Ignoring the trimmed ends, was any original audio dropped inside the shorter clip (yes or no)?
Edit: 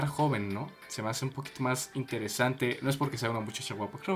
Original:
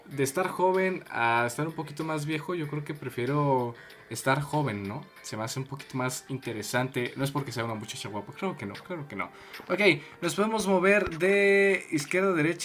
no